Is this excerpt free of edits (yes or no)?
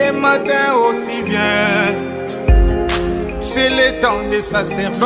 yes